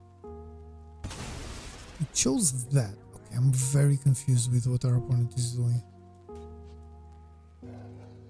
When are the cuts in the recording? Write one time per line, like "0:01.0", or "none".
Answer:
none

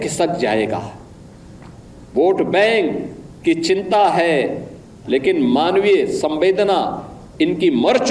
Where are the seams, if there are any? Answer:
none

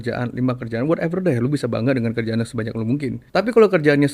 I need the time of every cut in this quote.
0:03.2

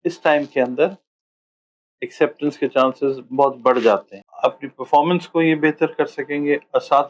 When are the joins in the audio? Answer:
0:04.2

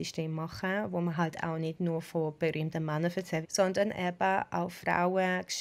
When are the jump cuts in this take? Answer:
0:03.5

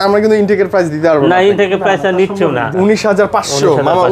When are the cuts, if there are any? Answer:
0:02.7

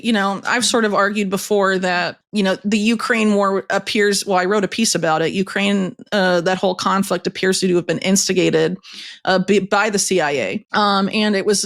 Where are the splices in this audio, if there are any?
0:02.2
0:10.6

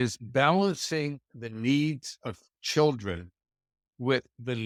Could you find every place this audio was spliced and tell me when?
none

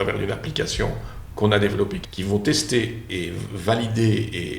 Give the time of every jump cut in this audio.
0:02.1
0:03.1

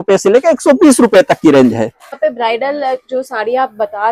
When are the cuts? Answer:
0:02.1

